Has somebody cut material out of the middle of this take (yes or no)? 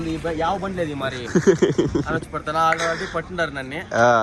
no